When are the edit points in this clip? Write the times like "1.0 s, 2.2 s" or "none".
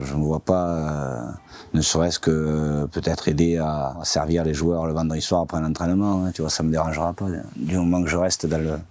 none